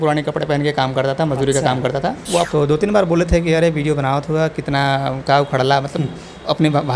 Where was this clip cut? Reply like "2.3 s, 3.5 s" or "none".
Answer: 2.5 s